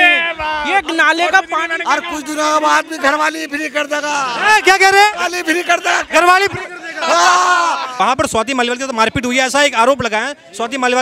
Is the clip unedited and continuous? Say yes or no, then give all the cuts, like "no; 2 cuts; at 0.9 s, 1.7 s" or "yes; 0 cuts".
no; 1 cut; at 7.9 s